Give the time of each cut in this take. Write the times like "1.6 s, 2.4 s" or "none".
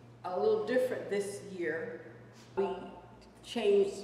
2.6 s